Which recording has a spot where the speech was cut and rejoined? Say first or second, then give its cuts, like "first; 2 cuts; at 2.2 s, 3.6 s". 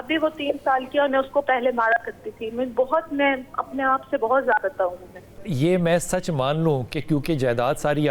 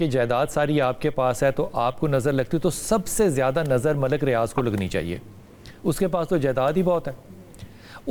first; 1 cut; at 5.4 s